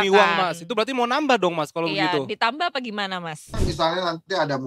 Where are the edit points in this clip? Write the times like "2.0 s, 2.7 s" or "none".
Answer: 3.7 s